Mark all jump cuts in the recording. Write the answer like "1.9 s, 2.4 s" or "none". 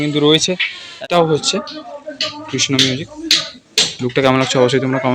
0.9 s